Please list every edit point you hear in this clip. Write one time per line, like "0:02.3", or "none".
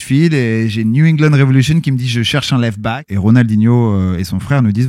0:03.0

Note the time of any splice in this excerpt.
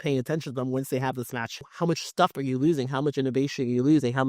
0:01.4

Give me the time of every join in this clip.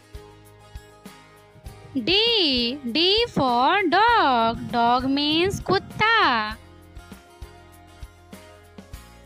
0:06.6

